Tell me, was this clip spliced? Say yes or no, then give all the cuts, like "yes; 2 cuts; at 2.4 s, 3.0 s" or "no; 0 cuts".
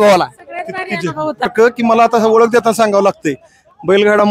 yes; 1 cut; at 1.5 s